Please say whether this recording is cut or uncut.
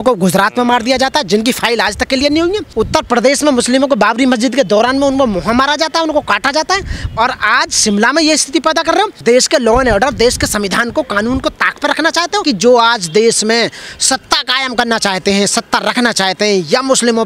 cut